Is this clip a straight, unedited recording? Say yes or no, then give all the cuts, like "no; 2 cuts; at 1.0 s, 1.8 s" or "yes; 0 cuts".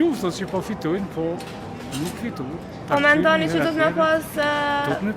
yes; 0 cuts